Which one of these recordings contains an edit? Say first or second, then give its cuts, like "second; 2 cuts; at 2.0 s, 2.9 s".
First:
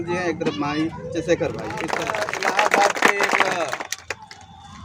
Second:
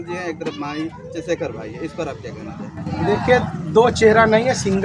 first; 1 cut; at 2.0 s